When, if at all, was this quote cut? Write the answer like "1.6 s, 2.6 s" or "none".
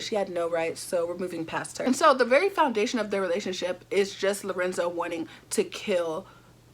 1.8 s